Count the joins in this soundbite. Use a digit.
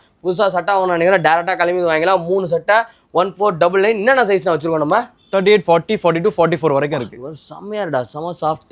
0